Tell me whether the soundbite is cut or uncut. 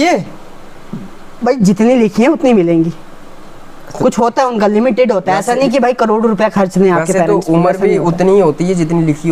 uncut